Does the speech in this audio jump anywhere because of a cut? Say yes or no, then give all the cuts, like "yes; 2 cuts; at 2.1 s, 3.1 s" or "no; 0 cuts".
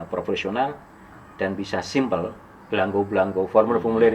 no; 0 cuts